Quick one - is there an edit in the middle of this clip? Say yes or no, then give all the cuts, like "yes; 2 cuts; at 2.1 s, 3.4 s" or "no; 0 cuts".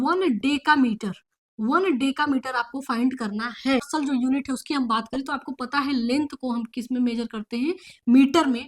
yes; 1 cut; at 3.9 s